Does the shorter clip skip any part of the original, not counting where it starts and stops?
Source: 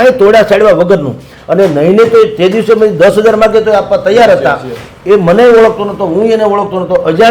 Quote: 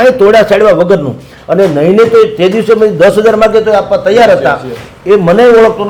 no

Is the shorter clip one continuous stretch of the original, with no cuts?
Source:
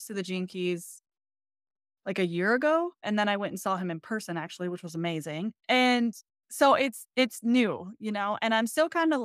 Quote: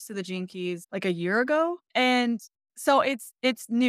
no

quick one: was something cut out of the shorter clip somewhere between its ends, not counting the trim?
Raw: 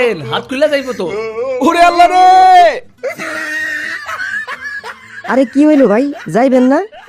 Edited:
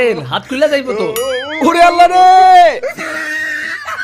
yes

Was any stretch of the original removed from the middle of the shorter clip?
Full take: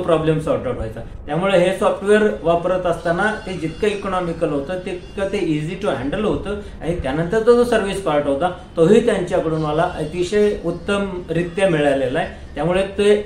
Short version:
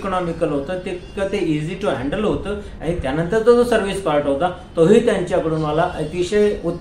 no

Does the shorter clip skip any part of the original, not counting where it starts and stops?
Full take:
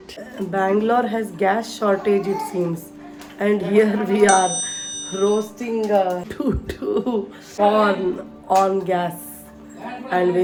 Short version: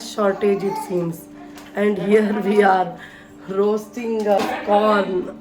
yes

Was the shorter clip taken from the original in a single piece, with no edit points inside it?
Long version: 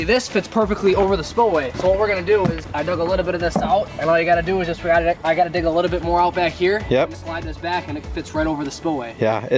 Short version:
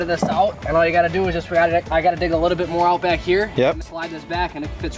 yes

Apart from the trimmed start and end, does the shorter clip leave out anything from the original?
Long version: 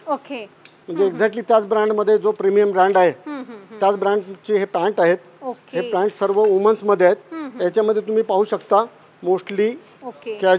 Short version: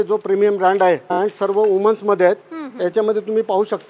yes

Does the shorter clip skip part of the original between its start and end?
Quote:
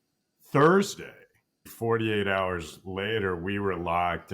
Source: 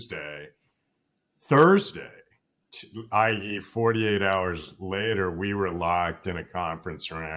yes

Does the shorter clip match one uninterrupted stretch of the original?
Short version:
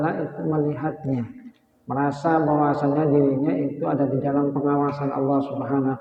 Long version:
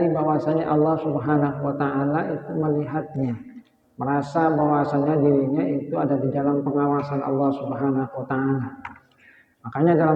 yes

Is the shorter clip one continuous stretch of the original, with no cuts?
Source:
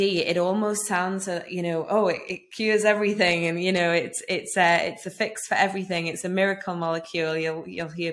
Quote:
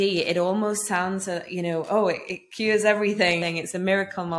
no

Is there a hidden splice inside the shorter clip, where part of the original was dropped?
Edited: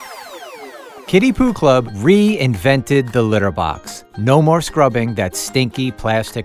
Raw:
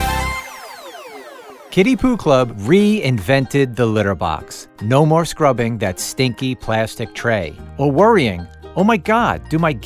yes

